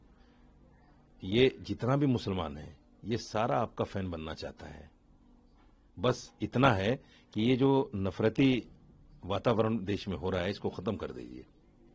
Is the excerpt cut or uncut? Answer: uncut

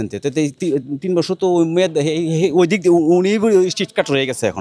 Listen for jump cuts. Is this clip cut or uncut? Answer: uncut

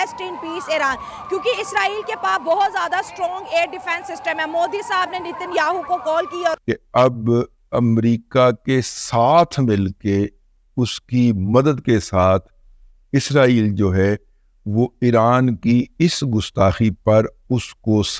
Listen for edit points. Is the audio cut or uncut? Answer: uncut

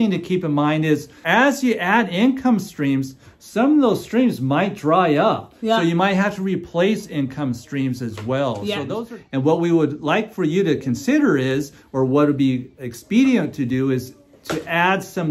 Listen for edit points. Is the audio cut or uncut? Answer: cut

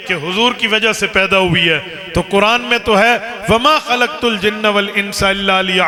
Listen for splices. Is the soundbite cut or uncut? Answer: uncut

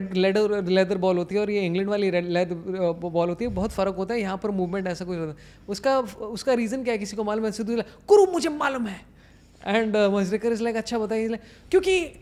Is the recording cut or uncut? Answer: uncut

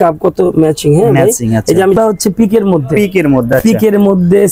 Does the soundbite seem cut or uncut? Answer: cut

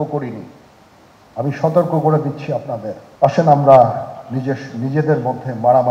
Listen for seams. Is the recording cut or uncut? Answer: cut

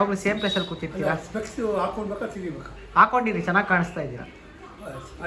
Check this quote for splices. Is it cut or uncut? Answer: uncut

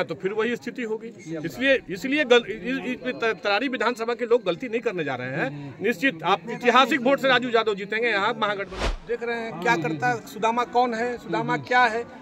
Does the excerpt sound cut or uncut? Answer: cut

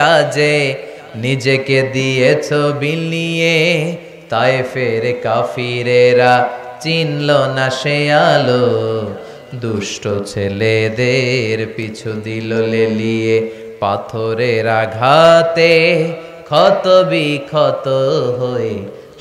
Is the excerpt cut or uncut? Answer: uncut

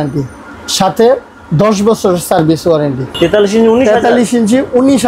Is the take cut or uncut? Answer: cut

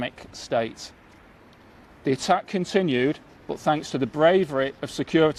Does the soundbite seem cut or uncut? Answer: uncut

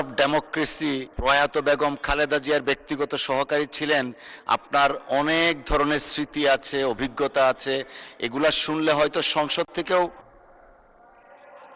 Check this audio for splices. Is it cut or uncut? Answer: cut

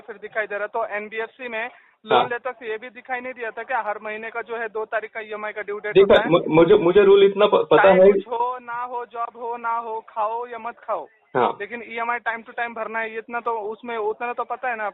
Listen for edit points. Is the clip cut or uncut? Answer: uncut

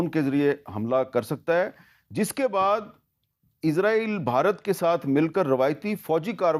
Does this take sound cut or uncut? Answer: uncut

